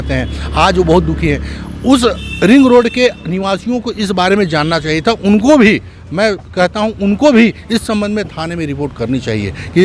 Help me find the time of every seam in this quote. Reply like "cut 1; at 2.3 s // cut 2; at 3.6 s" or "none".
none